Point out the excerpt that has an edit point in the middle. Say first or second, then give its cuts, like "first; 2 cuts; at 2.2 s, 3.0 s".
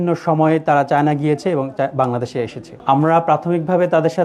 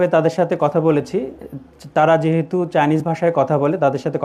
first; 1 cut; at 2.7 s